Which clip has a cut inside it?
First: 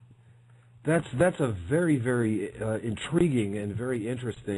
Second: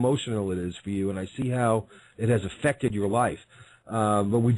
second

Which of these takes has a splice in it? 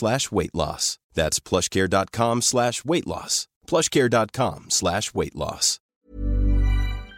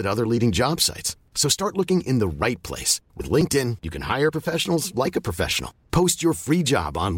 first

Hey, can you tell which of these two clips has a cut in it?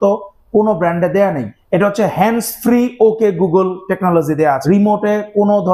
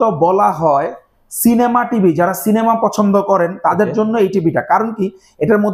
first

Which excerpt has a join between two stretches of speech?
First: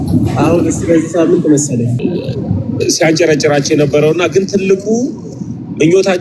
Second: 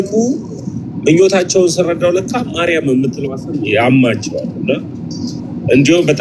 first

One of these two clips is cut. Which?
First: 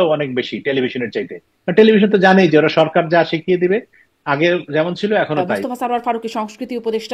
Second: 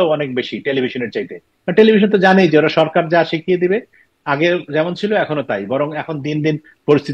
first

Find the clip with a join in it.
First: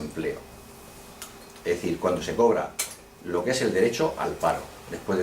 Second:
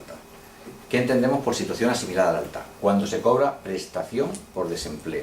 second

